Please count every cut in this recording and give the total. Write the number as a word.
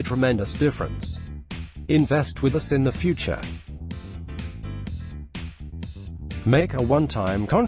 three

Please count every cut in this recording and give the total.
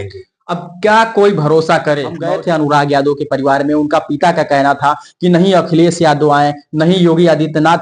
one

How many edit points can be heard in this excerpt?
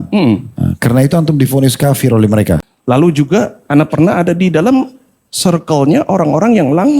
one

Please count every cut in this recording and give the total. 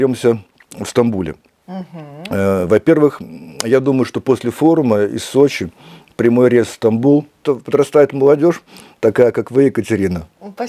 one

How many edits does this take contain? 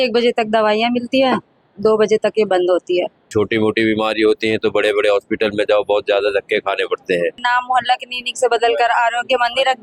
two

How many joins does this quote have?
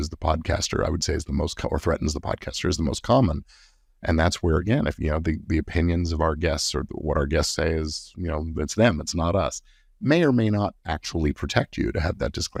zero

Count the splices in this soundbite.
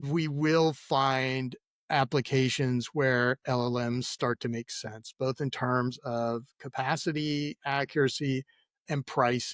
zero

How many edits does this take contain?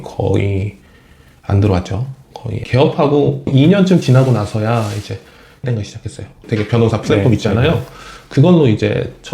one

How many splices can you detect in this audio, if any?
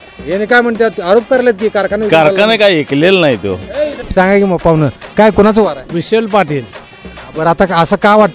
one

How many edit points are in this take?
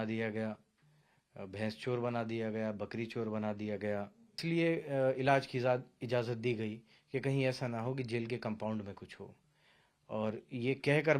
one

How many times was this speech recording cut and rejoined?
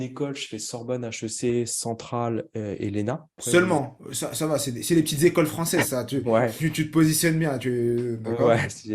one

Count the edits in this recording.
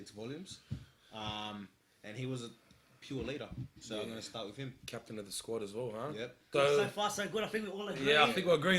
one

